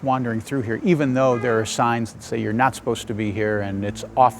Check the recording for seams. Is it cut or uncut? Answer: uncut